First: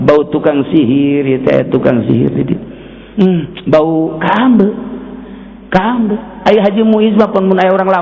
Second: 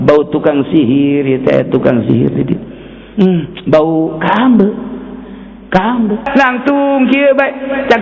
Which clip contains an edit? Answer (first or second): second